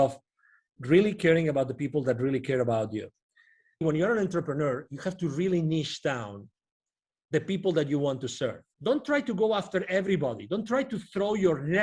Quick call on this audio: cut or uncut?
cut